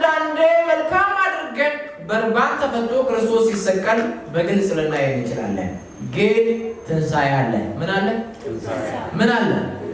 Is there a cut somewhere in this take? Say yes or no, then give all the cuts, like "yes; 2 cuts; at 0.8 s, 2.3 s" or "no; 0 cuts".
no; 0 cuts